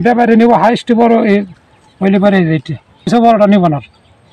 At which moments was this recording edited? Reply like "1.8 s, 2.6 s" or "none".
3.1 s